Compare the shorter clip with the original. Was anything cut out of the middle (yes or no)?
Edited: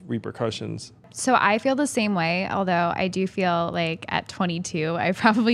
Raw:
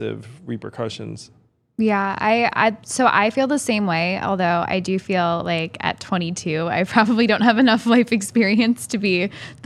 yes